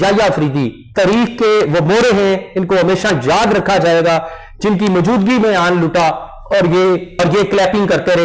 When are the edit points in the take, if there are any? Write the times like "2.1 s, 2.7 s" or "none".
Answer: 7.2 s